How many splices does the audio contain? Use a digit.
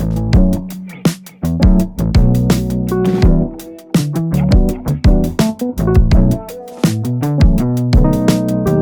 0